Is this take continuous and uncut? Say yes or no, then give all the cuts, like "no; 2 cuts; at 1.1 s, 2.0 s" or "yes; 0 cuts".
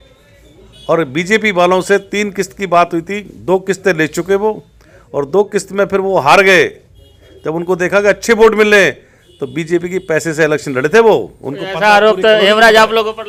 yes; 0 cuts